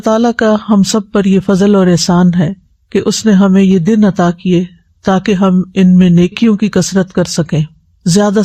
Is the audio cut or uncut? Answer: uncut